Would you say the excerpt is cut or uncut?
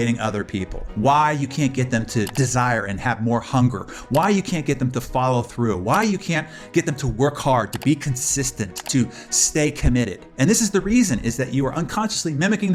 uncut